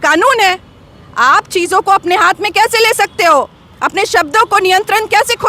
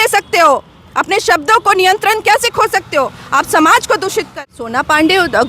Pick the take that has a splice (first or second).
second